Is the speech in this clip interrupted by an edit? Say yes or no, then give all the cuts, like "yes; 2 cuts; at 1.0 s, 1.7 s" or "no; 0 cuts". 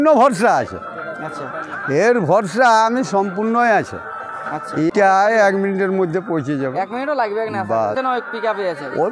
yes; 2 cuts; at 4.9 s, 7.9 s